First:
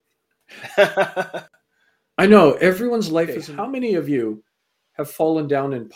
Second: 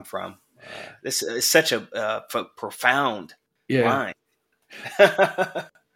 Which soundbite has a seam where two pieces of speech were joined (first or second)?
first